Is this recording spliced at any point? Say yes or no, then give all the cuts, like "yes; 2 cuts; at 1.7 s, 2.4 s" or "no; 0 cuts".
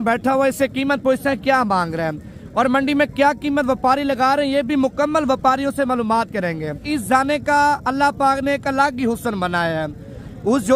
yes; 1 cut; at 6.8 s